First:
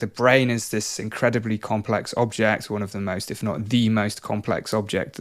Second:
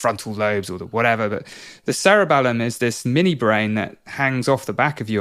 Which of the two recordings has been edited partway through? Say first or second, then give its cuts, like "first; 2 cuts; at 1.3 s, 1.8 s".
second; 1 cut; at 2.9 s